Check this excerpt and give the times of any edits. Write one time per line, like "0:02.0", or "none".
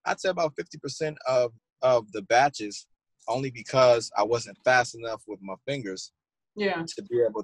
0:01.6